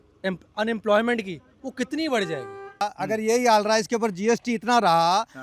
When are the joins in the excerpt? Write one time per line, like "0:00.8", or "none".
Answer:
0:02.8